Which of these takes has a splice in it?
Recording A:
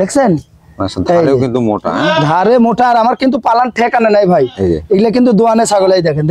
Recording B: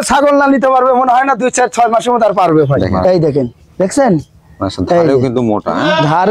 B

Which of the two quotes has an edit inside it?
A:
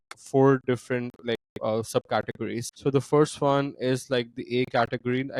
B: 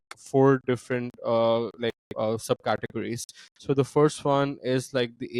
A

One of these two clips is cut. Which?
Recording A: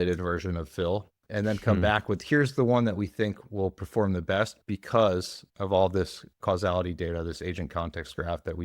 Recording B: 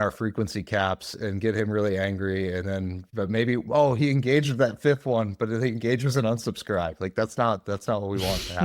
A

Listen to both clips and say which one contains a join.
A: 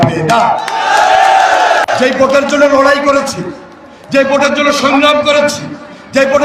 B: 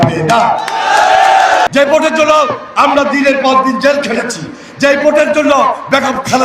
B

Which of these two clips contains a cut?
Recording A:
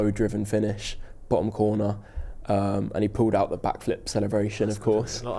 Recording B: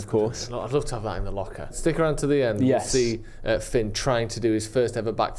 B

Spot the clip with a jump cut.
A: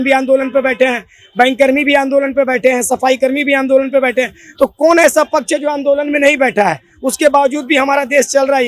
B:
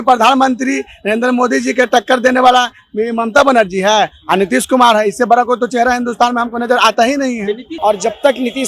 B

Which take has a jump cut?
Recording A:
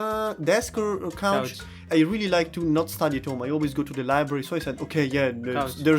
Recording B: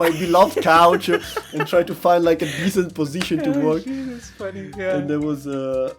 A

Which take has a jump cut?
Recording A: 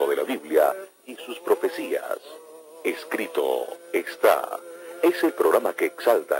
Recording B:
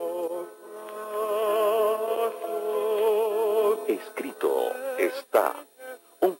A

